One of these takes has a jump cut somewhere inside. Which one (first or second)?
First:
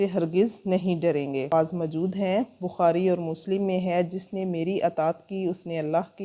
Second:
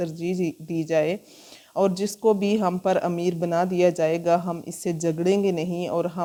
first